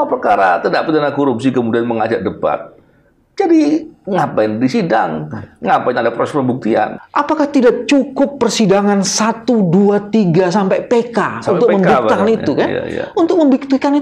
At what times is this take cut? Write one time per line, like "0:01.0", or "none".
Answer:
0:07.0

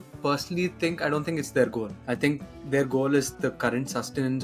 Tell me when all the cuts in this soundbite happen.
none

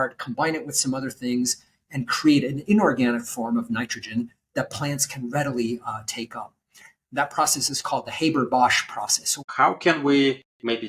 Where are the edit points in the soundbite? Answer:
0:09.5

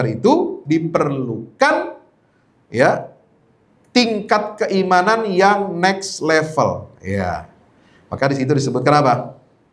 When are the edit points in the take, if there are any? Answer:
none

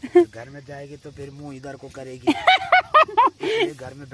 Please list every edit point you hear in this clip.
none

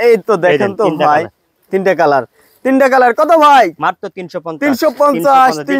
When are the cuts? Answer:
none

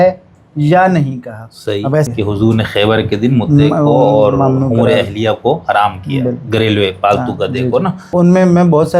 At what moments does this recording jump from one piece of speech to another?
0:02.1
0:08.1

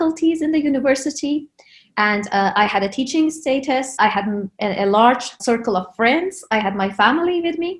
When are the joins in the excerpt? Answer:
0:04.0
0:05.4

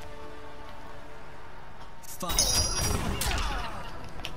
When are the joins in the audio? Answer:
0:02.3

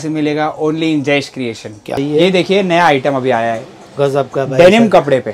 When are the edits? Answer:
0:02.0

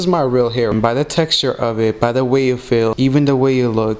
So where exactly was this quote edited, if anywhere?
0:00.7
0:02.9

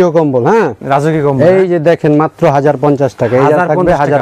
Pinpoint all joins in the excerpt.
none

